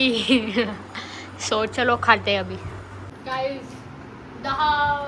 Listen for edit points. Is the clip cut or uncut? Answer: uncut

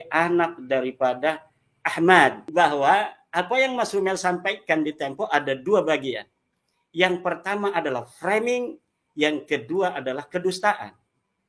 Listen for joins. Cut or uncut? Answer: cut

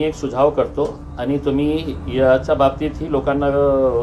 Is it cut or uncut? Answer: uncut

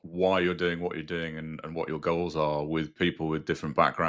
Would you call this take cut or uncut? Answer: uncut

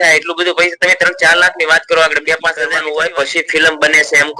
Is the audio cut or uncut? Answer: cut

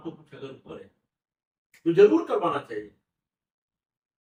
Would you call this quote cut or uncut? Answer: uncut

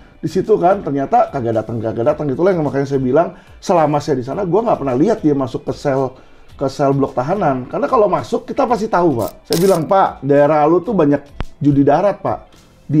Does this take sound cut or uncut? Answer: cut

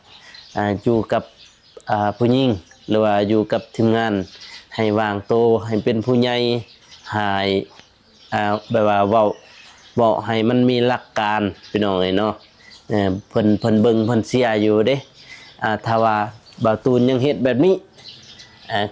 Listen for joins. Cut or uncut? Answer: uncut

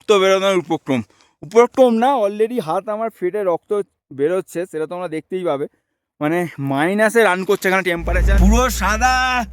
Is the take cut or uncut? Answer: cut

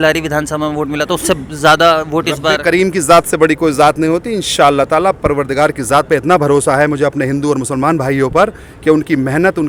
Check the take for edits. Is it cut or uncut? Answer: uncut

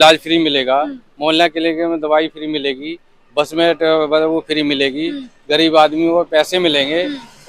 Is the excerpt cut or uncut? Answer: uncut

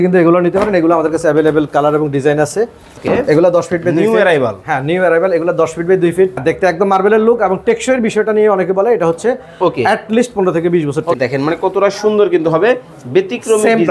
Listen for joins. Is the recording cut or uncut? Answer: cut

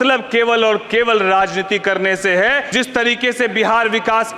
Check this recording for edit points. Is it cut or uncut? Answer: cut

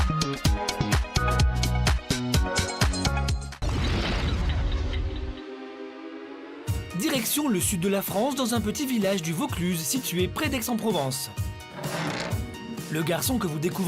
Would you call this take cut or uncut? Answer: cut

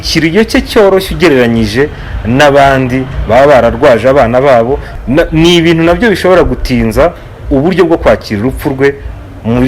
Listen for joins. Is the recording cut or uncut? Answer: cut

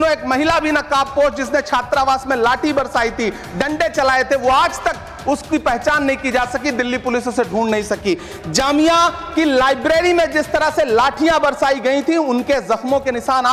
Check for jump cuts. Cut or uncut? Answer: uncut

